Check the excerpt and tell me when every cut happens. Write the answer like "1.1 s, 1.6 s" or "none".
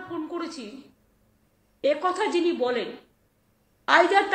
none